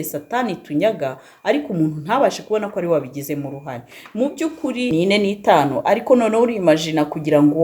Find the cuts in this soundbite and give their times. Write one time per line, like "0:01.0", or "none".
0:04.9